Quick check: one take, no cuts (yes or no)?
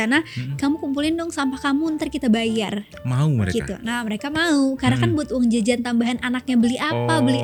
yes